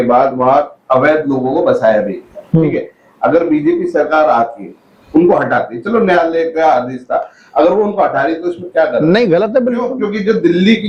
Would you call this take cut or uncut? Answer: uncut